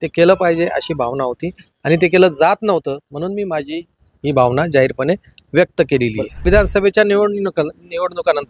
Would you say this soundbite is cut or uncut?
cut